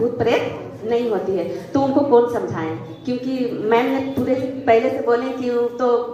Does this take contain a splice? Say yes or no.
no